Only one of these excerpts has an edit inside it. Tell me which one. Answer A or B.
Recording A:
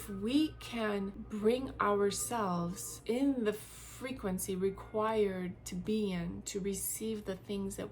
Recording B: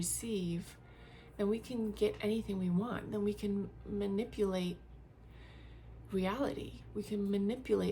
A